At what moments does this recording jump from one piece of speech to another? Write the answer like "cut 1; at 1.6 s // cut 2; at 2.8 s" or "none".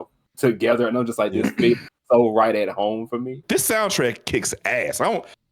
cut 1; at 3.4 s